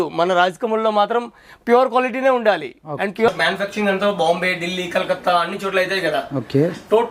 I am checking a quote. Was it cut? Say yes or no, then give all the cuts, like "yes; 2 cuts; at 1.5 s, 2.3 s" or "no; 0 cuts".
yes; 1 cut; at 3.3 s